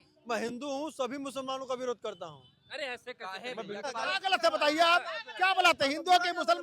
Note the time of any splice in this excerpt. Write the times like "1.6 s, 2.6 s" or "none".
3.9 s